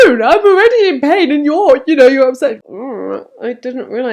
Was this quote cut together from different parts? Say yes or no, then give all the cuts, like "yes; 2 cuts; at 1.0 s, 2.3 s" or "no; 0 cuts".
yes; 1 cut; at 2.6 s